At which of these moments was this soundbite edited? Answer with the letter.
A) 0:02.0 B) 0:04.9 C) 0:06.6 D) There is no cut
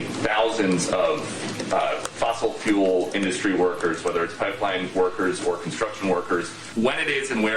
C